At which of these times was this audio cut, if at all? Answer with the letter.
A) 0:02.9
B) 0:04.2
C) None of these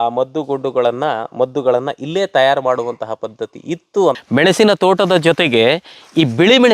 B